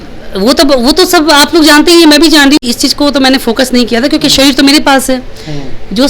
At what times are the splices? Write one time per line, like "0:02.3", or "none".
0:02.6